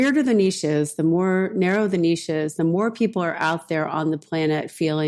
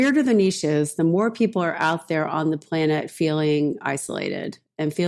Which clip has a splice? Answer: second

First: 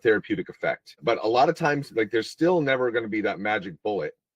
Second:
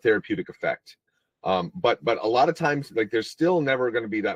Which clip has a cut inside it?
first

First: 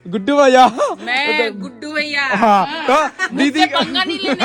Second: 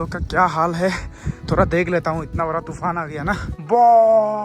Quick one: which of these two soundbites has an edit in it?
second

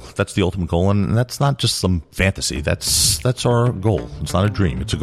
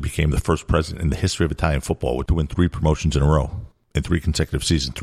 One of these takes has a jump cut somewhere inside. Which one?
second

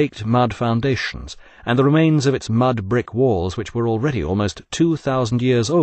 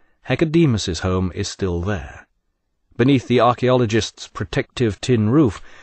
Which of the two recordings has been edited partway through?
second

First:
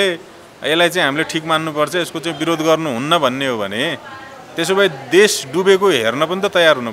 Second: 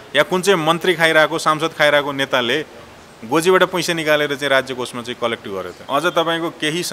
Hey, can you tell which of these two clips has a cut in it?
second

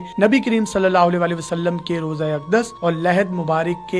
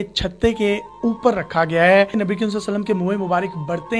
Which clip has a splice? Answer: second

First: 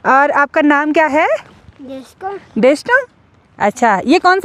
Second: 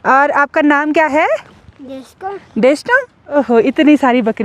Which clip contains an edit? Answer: second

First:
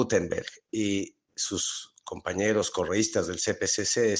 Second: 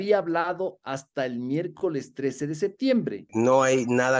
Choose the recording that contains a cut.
second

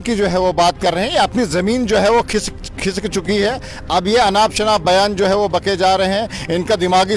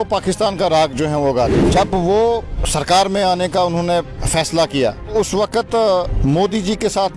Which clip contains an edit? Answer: second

